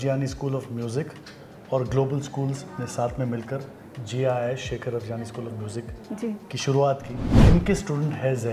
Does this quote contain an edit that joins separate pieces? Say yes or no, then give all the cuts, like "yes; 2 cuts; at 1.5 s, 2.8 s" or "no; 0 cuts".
yes; 1 cut; at 7.3 s